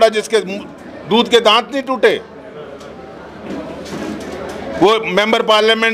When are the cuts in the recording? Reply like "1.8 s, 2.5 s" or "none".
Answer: none